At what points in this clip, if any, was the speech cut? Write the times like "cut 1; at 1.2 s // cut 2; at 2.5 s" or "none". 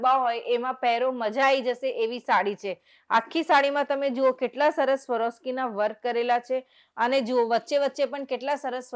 none